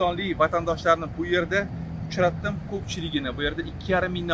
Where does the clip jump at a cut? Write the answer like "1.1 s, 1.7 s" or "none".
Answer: none